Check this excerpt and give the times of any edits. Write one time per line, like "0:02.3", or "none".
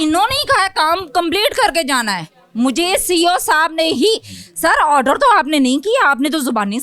none